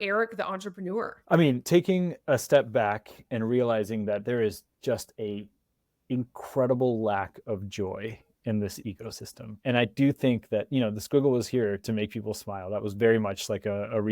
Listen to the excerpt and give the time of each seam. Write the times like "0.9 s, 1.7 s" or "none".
1.2 s